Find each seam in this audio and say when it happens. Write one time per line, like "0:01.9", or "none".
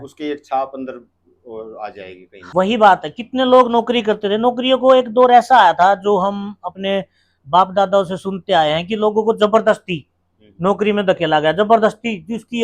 0:02.4